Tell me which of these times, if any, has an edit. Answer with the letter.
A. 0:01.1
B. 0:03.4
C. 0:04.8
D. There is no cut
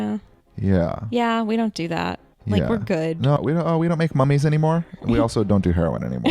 B